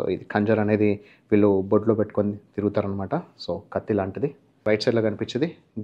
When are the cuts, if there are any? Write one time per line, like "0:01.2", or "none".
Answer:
0:04.5